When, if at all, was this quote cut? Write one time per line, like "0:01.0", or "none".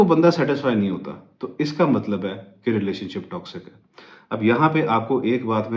none